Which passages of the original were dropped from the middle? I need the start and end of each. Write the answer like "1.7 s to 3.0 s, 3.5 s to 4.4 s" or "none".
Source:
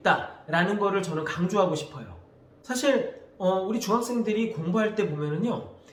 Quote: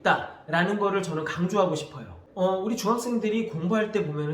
2.2 s to 3.2 s